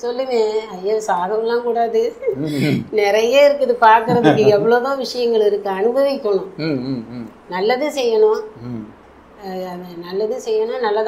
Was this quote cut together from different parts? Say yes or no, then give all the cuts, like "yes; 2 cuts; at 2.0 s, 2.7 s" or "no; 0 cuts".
no; 0 cuts